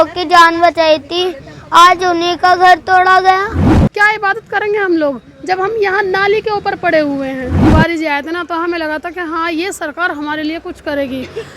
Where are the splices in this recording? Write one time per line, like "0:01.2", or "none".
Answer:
0:03.5
0:07.6